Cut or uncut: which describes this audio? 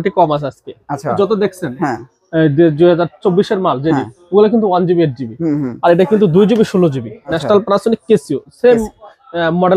cut